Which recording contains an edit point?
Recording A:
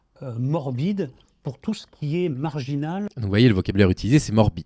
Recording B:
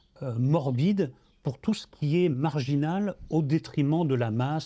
B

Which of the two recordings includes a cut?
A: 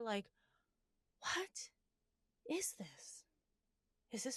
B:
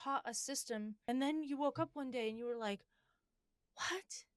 B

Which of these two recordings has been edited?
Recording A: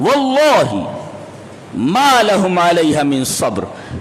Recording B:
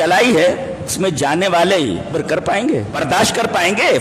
B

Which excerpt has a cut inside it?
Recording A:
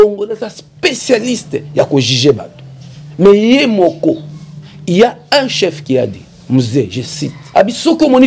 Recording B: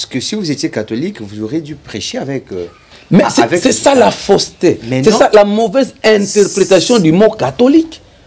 A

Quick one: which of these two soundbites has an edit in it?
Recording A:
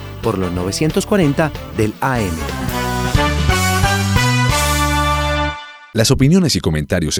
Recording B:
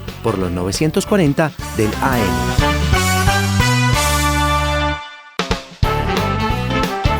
B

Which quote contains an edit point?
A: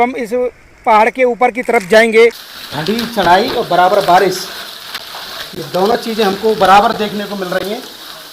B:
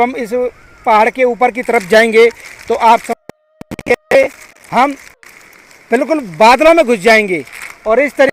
A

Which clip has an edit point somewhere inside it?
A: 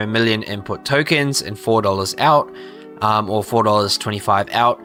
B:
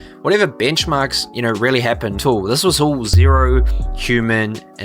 B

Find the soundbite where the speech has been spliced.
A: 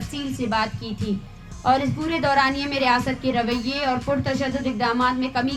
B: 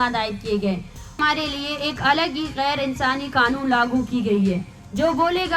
B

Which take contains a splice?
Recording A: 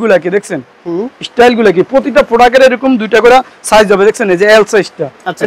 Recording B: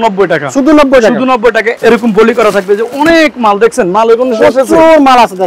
B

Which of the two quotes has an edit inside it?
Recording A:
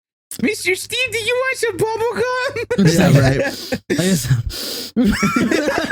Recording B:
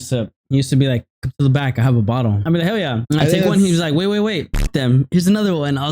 B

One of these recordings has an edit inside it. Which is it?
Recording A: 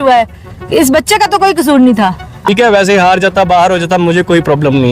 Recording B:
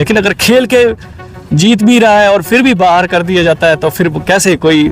A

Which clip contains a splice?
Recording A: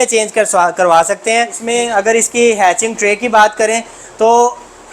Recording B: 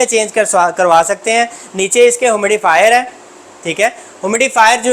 A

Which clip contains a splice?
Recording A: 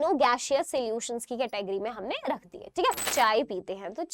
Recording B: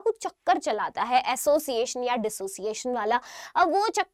A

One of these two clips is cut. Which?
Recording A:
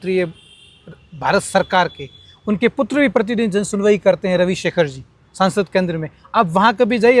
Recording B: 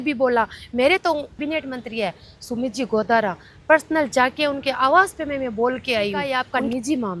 B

